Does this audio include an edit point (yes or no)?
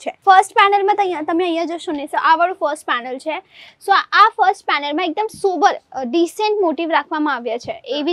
no